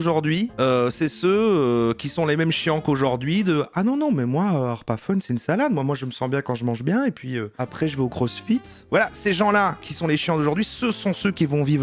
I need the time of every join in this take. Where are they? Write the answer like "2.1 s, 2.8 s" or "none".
none